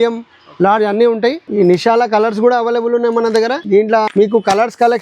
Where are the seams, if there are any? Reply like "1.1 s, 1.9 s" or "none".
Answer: 1.4 s, 3.9 s